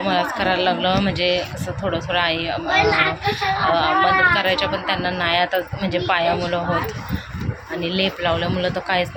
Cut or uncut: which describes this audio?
uncut